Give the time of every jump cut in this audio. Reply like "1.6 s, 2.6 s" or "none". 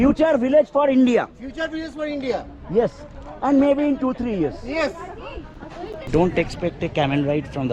6.1 s